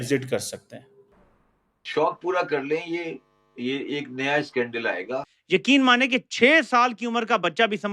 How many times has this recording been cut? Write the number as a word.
one